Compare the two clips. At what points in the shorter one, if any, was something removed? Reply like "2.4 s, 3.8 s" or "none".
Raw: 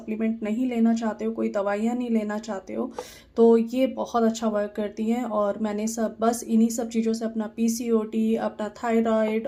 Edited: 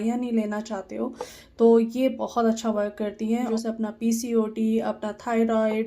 3.5 s